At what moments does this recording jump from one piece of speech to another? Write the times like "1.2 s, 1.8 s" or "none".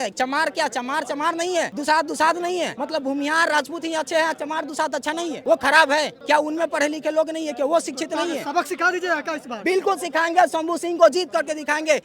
1.7 s, 2.7 s, 5.4 s, 6.1 s